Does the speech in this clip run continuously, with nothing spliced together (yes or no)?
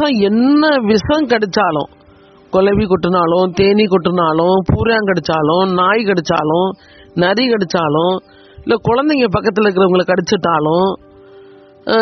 yes